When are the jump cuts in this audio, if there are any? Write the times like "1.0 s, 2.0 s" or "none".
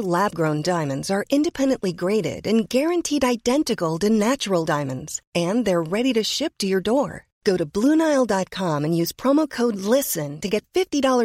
none